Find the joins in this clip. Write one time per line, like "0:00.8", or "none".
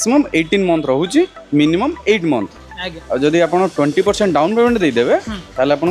none